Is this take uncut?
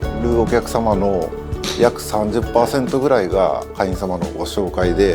yes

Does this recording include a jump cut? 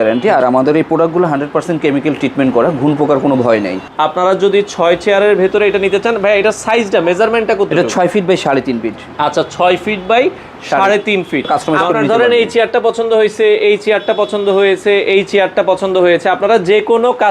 yes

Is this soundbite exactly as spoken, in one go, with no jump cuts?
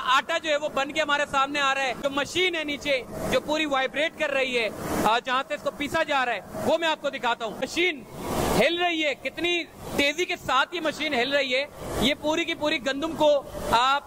no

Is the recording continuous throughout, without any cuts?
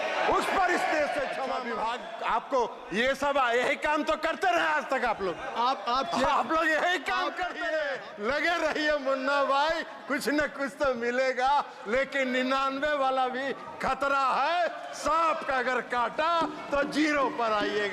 no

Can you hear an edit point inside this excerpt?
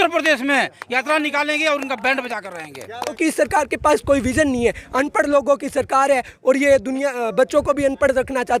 yes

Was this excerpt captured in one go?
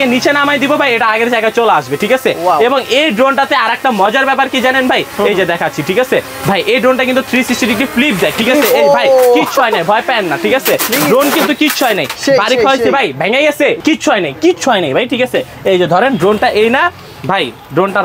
yes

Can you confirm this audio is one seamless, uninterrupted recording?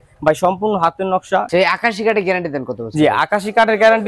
no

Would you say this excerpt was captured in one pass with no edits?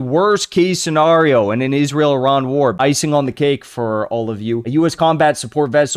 no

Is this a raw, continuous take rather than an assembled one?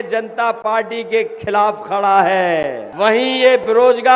no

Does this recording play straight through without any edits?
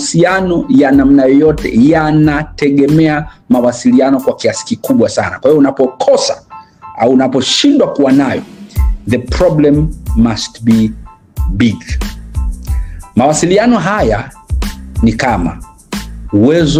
yes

